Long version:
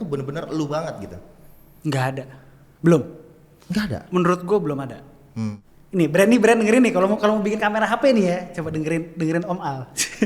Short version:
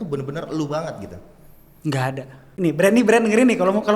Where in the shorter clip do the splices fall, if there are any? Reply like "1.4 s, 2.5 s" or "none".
2.4 s